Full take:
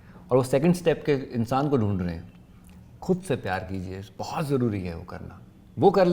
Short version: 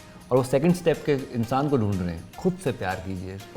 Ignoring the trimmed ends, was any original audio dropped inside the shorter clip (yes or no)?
yes